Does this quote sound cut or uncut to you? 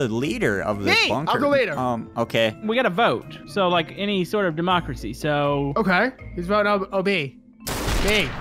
cut